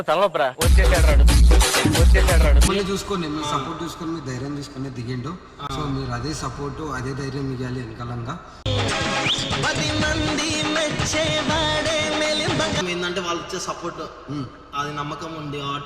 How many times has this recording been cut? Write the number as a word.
two